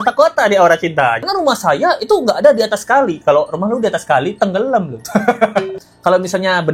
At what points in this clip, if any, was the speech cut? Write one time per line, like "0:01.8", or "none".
0:01.3
0:05.8

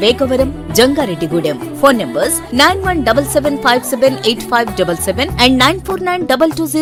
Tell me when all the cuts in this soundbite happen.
none

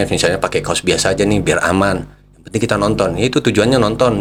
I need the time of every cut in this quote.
none

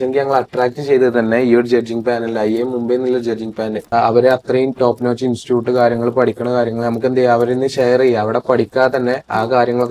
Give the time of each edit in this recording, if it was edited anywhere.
0:03.9

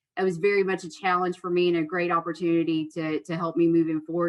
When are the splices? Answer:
none

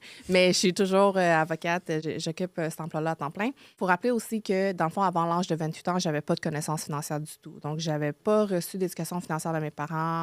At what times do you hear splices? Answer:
0:02.0
0:03.8
0:08.2

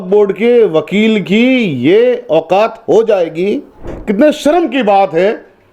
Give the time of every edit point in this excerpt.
0:04.0

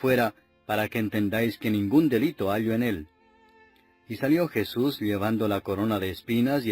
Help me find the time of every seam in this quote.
0:01.3

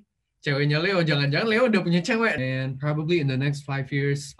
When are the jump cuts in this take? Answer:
0:02.4

